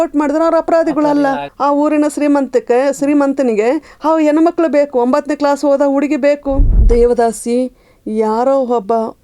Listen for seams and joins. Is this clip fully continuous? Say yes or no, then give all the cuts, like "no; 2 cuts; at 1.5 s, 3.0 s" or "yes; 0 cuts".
no; 2 cuts; at 1.5 s, 6.7 s